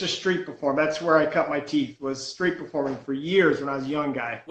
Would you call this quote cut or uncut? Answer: uncut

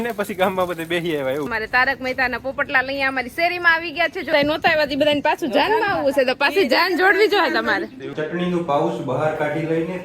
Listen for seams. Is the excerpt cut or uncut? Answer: cut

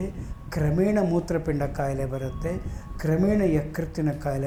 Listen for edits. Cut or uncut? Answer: uncut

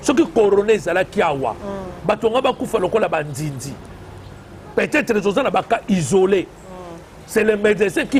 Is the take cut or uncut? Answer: uncut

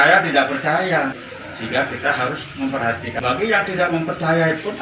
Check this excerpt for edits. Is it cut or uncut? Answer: cut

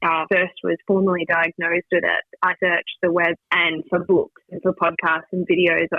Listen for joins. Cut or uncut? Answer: uncut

